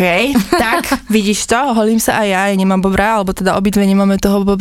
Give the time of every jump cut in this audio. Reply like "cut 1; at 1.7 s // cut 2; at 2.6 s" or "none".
none